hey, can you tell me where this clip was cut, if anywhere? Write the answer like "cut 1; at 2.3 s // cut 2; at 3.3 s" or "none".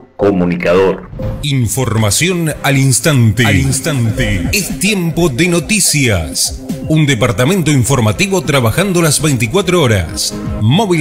cut 1; at 1.1 s